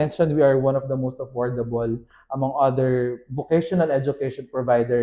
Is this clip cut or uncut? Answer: uncut